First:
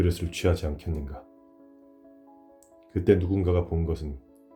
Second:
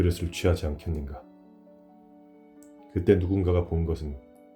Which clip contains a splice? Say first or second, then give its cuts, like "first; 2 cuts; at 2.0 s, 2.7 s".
second; 2 cuts; at 1.2 s, 2.6 s